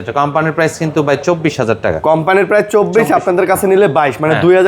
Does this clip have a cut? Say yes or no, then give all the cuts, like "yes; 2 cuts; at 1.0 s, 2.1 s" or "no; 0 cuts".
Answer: no; 0 cuts